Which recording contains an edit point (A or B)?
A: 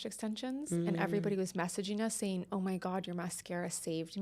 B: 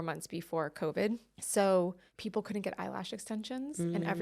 B